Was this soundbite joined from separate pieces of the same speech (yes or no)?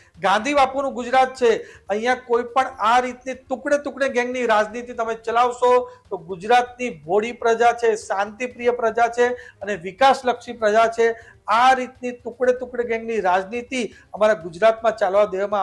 no